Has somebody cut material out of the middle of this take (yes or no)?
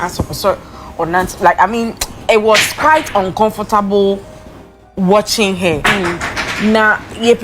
no